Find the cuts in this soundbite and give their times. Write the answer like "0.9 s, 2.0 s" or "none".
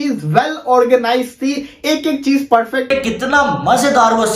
2.9 s